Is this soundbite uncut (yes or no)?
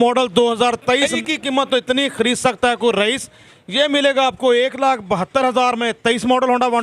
no